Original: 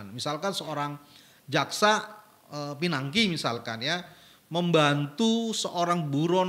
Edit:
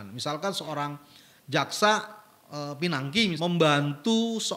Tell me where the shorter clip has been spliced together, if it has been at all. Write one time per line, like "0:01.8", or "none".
0:03.4